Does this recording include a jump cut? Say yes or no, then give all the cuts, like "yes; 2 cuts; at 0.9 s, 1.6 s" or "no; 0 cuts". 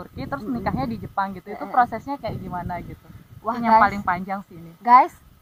no; 0 cuts